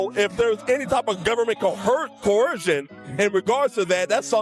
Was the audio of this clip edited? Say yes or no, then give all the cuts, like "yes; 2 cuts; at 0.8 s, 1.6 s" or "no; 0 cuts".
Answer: no; 0 cuts